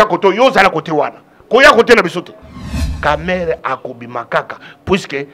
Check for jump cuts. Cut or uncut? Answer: cut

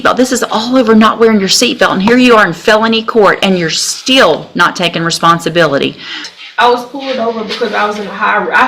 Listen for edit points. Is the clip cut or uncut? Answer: cut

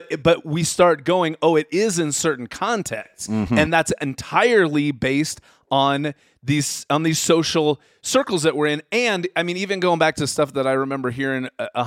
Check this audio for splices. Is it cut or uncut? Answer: uncut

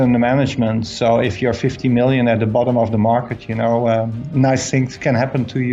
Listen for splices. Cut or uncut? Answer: uncut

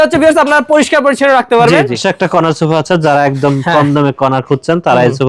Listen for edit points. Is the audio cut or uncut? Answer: cut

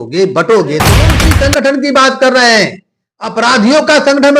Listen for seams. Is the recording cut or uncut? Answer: cut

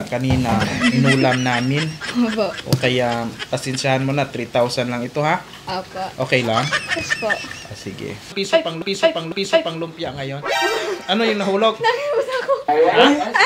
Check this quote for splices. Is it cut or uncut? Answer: cut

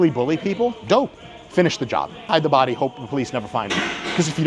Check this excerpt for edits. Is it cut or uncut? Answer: cut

